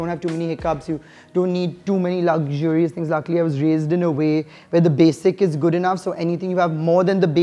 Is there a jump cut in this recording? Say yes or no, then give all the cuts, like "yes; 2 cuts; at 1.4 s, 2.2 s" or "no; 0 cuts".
no; 0 cuts